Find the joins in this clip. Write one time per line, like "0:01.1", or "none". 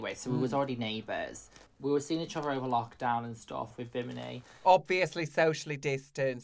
0:01.6
0:03.7

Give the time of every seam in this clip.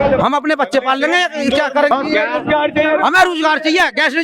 0:01.9

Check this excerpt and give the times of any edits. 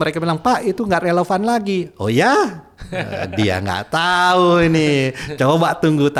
none

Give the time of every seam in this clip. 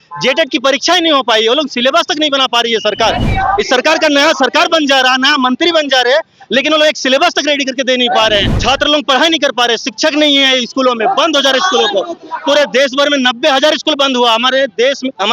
0:08.5

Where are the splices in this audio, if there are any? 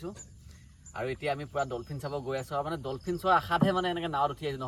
none

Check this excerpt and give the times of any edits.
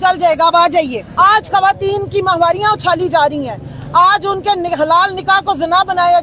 0:01.0

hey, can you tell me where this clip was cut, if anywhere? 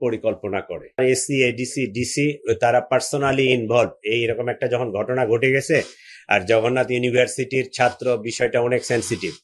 0:01.0

